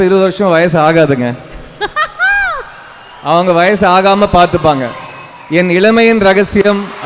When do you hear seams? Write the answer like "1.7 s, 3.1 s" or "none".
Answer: none